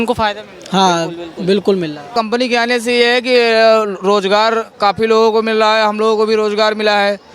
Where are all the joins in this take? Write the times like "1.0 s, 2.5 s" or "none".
2.1 s